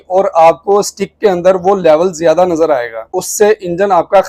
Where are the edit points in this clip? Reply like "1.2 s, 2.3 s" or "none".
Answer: 3.1 s